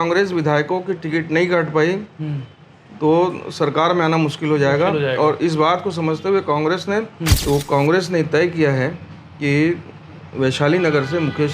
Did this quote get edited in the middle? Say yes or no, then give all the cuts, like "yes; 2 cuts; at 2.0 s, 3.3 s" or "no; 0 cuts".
yes; 1 cut; at 7.3 s